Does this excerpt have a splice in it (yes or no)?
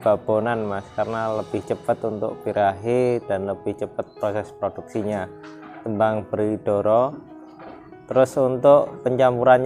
no